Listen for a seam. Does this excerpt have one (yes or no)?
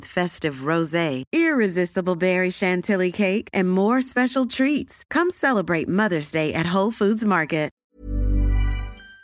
yes